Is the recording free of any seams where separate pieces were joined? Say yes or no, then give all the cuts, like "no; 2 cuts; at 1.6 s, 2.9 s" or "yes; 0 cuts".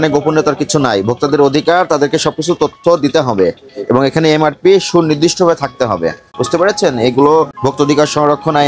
no; 2 cuts; at 6.3 s, 7.5 s